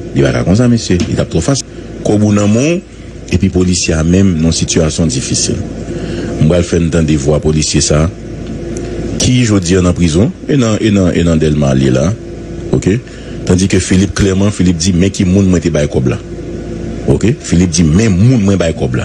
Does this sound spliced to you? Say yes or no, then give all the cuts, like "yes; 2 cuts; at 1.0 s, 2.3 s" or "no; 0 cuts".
yes; 1 cut; at 1.6 s